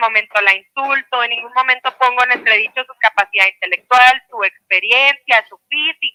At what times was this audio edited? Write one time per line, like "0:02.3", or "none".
none